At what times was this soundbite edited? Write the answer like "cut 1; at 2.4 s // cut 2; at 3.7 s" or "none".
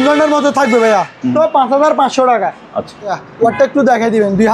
cut 1; at 1.3 s // cut 2; at 3.1 s